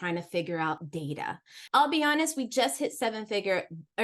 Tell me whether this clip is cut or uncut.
cut